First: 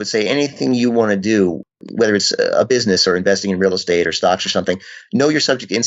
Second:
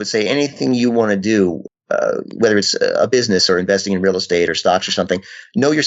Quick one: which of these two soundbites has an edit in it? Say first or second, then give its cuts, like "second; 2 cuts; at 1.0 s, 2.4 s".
first; 1 cut; at 1.8 s